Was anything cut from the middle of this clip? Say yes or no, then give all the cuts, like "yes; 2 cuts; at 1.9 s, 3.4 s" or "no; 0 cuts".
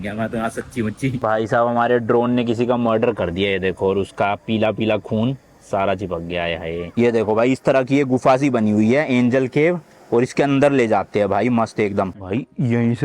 yes; 3 cuts; at 1.2 s, 6.9 s, 12.1 s